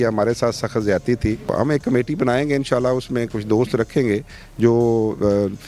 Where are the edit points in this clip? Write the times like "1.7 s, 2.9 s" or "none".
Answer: 1.5 s